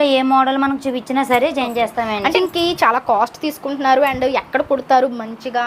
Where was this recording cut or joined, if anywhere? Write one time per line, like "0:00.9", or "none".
0:02.3